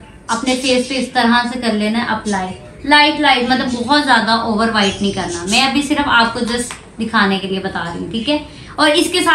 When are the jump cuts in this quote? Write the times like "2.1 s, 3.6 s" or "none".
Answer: none